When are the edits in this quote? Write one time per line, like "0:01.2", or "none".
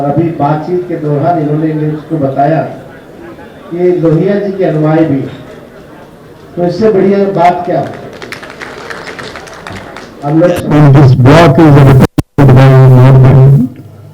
0:10.6